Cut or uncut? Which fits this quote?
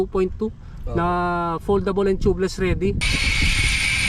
cut